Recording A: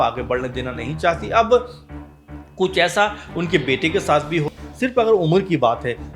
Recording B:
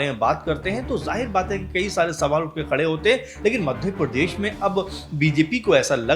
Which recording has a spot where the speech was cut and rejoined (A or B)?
A